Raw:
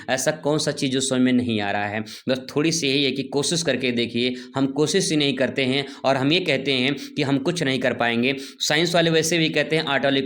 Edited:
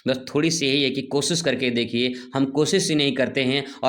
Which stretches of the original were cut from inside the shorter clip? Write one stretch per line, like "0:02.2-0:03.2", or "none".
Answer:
none